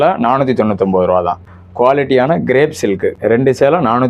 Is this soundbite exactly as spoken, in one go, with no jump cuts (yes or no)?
no